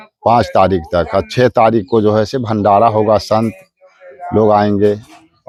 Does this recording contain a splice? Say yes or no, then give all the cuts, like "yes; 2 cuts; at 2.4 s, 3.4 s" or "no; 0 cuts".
no; 0 cuts